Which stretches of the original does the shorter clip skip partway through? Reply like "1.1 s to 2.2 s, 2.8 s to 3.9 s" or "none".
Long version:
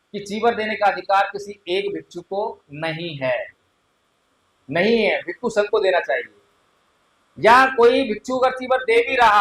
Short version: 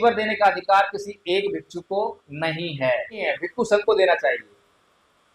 3.7 s to 5.1 s